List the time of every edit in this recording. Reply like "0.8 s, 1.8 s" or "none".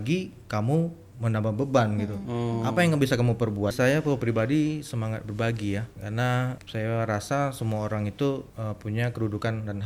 3.7 s, 6.1 s, 8.5 s